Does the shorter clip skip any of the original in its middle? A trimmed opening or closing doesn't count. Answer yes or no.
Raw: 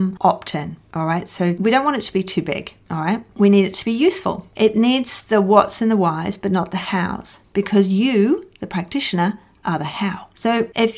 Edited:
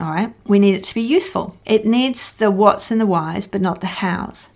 no